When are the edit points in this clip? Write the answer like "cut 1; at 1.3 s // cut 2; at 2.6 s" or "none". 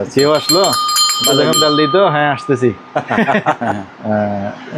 cut 1; at 3.6 s